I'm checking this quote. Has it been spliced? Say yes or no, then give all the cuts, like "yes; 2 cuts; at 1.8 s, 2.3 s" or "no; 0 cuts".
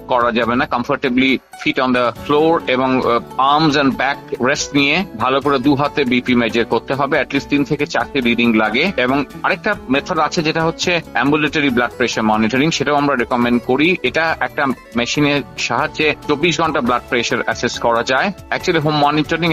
no; 0 cuts